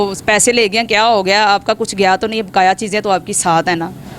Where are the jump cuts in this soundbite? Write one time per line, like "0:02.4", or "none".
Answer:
none